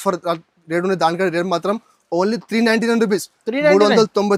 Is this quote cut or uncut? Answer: uncut